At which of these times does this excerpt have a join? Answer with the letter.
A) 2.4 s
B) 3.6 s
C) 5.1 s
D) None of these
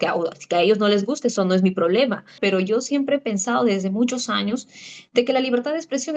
A